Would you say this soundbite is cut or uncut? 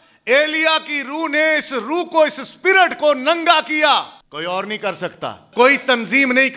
cut